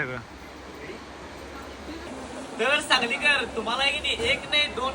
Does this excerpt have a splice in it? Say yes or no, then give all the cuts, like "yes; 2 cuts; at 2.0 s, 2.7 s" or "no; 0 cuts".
yes; 1 cut; at 2.1 s